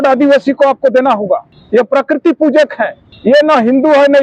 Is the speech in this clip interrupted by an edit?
yes; 2 cuts; at 1.5 s, 3.1 s

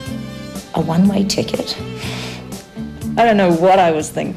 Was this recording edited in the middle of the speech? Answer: no; 0 cuts

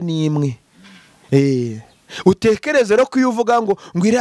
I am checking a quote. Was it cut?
no; 0 cuts

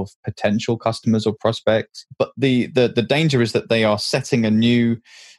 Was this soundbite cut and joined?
yes; 1 cut; at 2.0 s

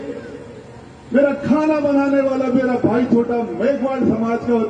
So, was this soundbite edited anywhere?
no; 0 cuts

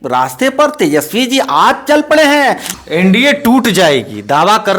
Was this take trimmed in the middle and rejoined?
yes; 1 cut; at 2.7 s

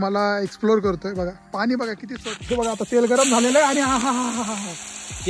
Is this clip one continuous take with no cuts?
no; 1 cut; at 2.1 s

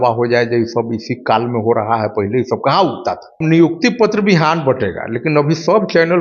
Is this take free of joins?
no; 1 cut; at 3.4 s

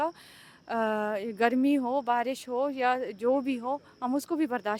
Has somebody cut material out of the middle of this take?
no; 0 cuts

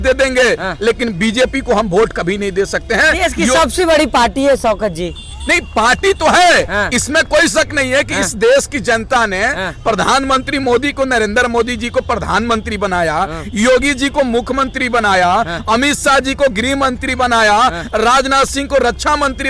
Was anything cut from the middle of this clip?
no; 0 cuts

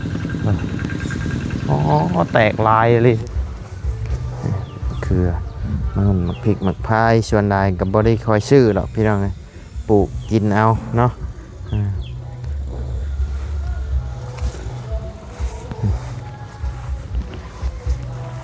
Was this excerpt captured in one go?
no; 1 cut; at 3.2 s

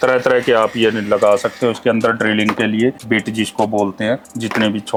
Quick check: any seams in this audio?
no; 0 cuts

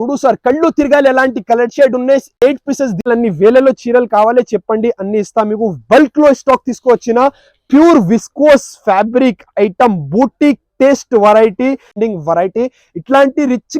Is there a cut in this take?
yes; 2 cuts; at 3.1 s, 11.9 s

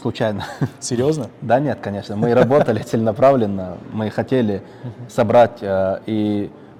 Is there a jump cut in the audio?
no; 0 cuts

